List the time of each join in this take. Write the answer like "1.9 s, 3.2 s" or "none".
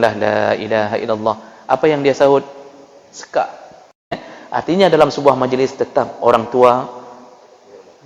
4.3 s